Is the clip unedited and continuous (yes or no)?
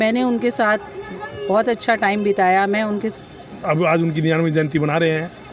no